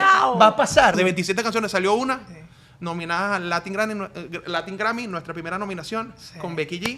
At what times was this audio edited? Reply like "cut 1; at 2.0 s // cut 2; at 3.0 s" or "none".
cut 1; at 0.9 s